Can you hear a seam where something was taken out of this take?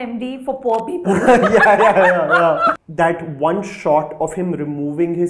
yes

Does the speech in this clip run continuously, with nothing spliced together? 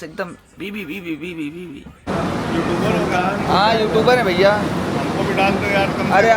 no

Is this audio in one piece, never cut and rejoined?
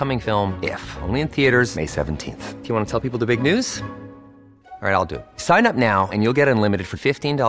yes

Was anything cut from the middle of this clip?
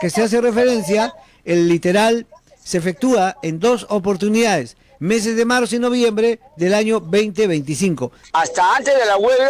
yes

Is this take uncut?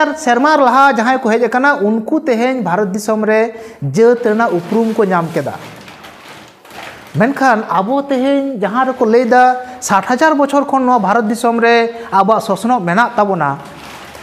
yes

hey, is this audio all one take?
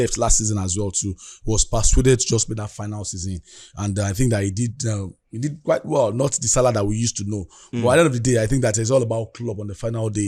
yes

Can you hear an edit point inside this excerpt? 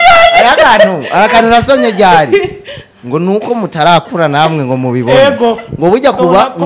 no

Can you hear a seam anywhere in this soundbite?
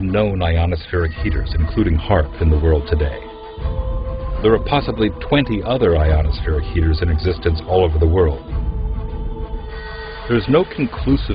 no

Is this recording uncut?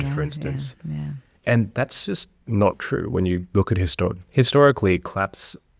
yes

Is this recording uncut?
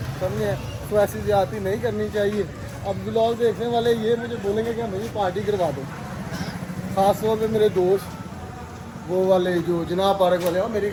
yes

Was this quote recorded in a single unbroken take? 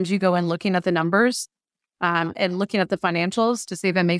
yes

